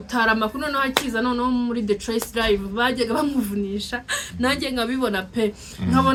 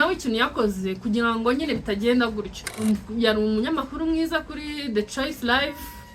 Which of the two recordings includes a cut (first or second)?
second